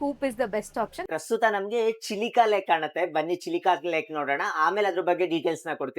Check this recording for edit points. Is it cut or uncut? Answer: cut